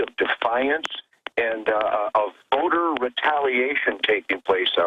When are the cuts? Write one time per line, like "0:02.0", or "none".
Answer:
none